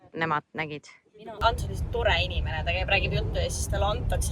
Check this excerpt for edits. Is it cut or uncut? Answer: cut